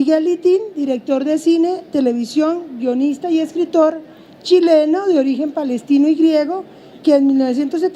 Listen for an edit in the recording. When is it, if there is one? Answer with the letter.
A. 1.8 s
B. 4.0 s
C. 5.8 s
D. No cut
C